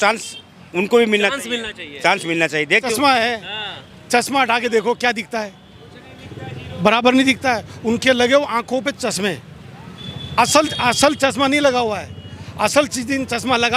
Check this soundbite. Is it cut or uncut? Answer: cut